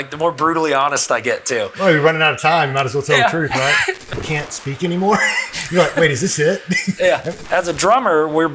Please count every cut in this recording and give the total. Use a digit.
2